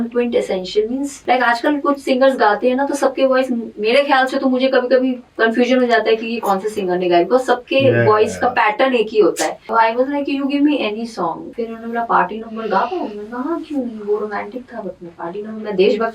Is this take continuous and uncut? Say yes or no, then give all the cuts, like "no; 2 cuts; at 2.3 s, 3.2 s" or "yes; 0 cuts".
no; 4 cuts; at 1.1 s, 5.2 s, 9.7 s, 11.5 s